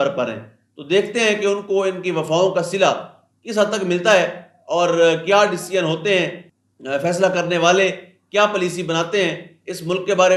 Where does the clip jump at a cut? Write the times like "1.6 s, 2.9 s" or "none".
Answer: none